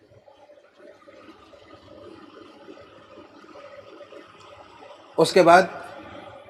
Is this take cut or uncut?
uncut